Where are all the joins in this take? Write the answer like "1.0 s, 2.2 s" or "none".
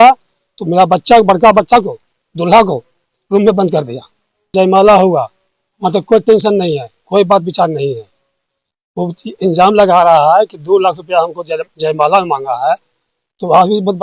4.5 s